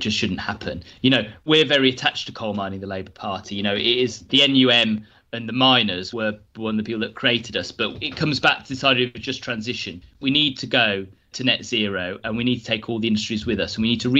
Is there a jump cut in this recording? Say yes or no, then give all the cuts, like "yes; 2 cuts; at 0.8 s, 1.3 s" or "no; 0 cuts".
yes; 2 cuts; at 1.4 s, 4.3 s